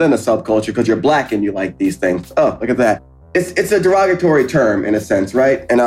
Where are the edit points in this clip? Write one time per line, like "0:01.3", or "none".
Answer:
0:03.1